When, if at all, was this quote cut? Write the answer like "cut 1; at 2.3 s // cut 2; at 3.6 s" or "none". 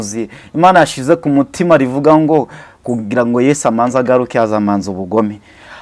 none